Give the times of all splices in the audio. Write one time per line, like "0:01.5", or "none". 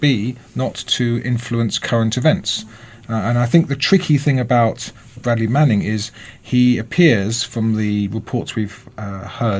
0:06.5

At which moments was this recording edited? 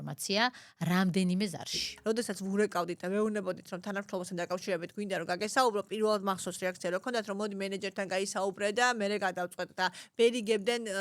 0:01.9

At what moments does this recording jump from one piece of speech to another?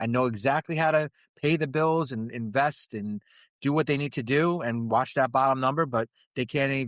none

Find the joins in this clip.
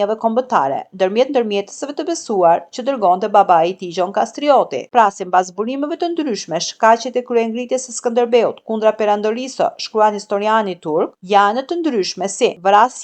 0:04.9

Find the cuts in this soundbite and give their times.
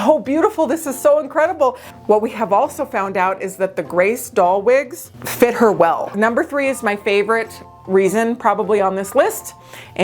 0:01.9
0:06.1

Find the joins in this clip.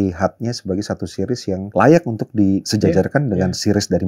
0:01.7
0:02.7

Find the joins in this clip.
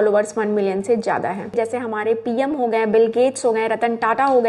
0:01.5

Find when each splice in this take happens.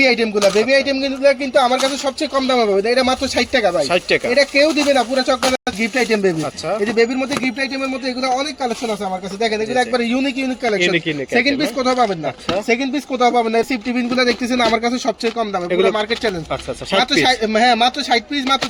none

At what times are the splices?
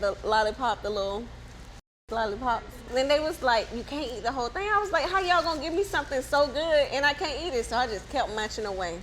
0:02.8

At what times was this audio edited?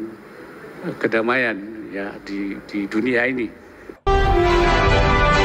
0:04.1

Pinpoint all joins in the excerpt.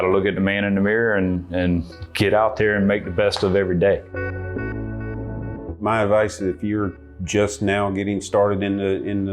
none

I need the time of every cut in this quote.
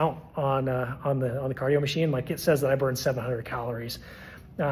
none

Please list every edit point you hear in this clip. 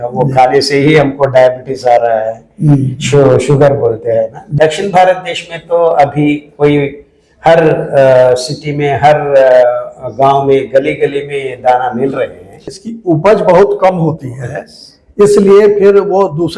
0:04.5
0:12.6

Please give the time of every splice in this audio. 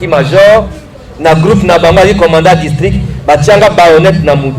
none

